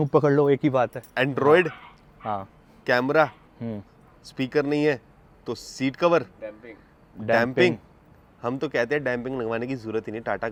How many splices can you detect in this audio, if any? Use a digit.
0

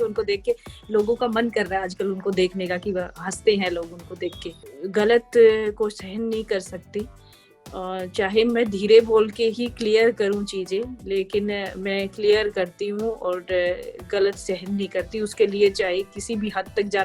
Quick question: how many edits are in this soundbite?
1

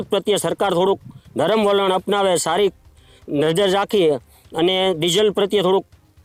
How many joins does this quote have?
0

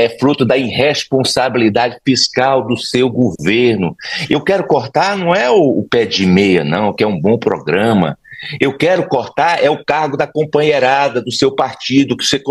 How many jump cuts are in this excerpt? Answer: 0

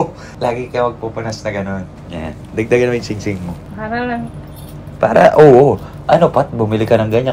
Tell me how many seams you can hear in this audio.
0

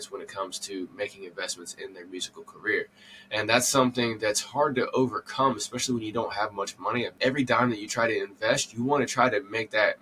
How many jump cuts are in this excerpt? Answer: 1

